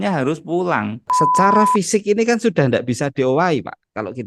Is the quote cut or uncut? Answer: cut